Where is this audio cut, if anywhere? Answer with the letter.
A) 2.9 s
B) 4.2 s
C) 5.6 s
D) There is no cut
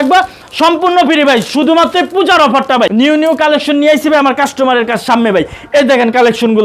A